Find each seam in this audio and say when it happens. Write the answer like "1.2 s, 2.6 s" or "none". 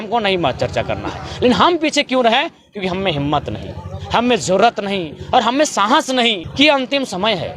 6.4 s